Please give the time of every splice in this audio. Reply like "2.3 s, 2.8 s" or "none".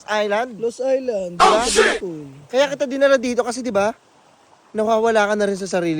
none